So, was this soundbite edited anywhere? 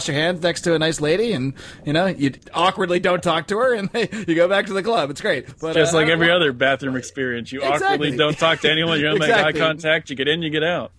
yes; 2 cuts; at 2.4 s, 5.5 s

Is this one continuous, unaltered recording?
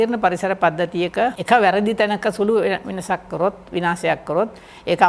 no; 1 cut; at 1.4 s

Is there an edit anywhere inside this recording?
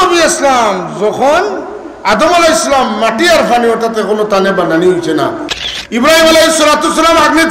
yes; 1 cut; at 5.5 s

